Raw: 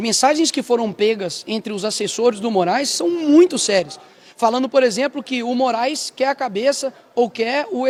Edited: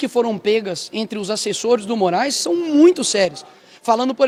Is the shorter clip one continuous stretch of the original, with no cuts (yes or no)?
yes